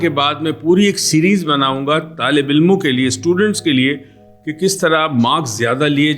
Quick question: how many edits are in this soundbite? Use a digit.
0